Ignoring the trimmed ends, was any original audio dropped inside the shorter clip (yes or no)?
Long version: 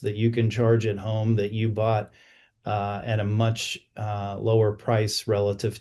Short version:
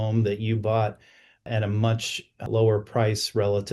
yes